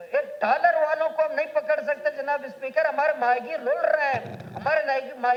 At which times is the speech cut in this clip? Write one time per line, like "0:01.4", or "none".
none